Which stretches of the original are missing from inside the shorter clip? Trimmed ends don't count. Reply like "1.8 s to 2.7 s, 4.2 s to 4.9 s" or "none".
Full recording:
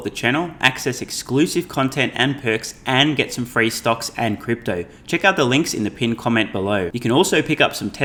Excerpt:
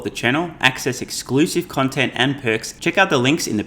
2.7 s to 5.0 s